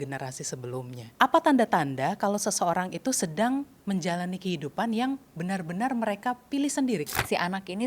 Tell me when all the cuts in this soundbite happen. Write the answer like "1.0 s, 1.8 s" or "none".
1.0 s, 7.1 s